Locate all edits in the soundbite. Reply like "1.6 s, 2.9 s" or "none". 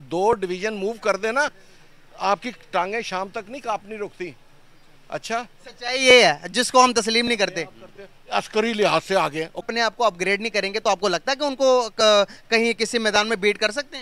9.7 s